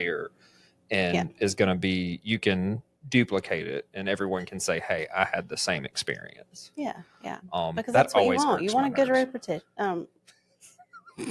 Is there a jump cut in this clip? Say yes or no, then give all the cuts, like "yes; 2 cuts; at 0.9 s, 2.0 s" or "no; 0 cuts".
no; 0 cuts